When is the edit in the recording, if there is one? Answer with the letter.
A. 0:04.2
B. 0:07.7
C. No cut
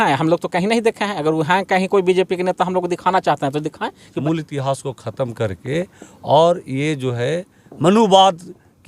A